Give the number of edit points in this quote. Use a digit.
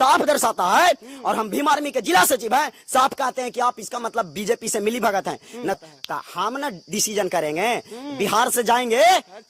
1